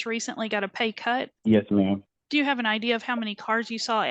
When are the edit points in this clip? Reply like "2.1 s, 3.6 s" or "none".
1.3 s, 2.1 s